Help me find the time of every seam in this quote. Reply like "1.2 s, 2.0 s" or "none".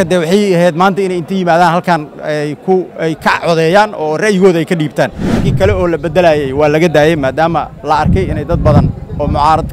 5.5 s